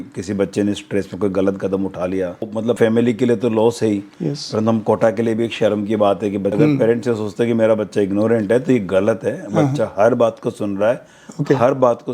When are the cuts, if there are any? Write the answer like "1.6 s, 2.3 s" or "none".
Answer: 2.5 s, 6.5 s